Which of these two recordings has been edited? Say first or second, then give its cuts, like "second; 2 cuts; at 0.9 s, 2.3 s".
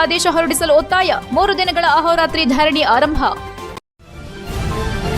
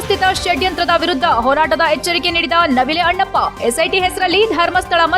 first; 1 cut; at 3.8 s